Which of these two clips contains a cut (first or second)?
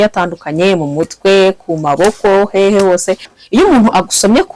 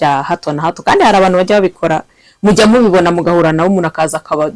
first